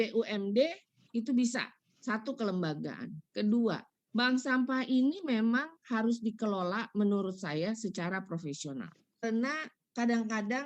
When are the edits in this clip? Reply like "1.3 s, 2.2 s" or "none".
9.2 s

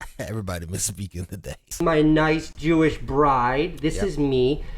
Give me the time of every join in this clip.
1.7 s

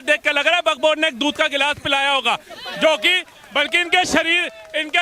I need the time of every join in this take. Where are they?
none

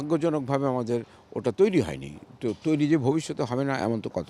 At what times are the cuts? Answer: none

